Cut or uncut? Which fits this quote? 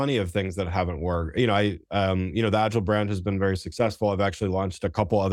uncut